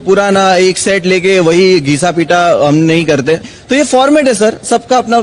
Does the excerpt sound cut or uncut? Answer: uncut